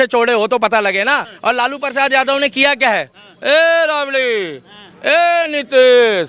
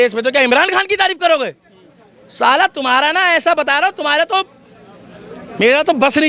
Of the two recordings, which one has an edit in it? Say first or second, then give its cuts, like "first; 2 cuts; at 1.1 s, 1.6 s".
first; 1 cut; at 1.3 s